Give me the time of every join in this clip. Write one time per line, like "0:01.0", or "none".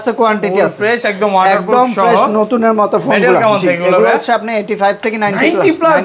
none

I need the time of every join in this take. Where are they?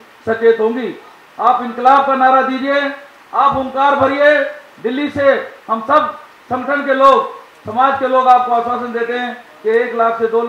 none

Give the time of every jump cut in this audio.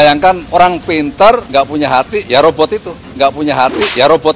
none

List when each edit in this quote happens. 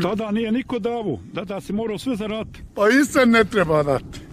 none

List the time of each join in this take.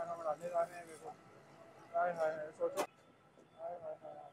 0:02.9

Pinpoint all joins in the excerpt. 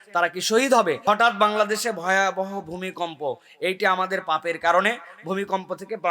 0:01.0

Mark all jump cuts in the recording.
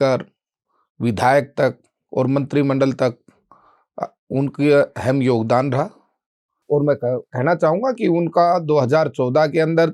0:06.5

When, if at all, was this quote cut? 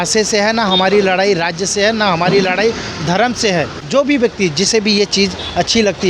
0:03.8

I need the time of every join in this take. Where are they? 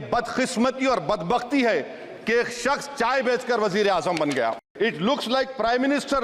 0:04.6

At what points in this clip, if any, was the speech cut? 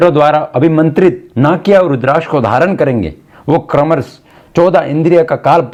none

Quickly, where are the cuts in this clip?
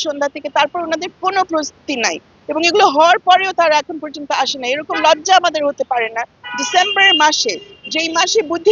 none

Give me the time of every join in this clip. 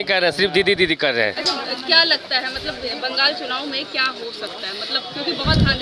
none

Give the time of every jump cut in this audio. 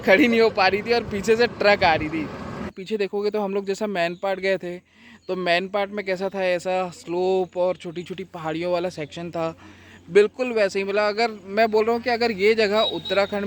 0:02.8

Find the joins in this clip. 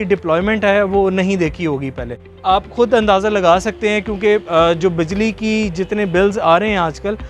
0:02.3

